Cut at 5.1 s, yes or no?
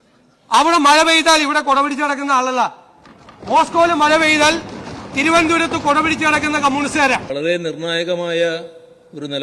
no